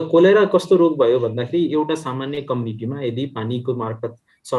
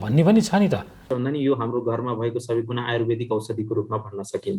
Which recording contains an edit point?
second; 1 cut; at 1.0 s

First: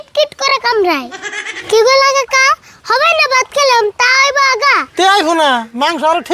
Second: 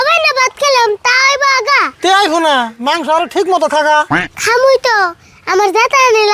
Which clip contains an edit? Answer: first; 1 cut; at 1.5 s

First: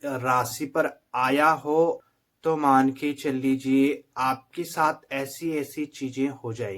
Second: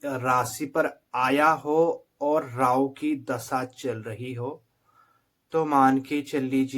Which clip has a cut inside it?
first; 1 cut; at 2.1 s

